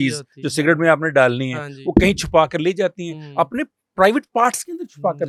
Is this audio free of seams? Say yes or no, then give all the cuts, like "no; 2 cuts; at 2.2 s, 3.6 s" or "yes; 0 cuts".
yes; 0 cuts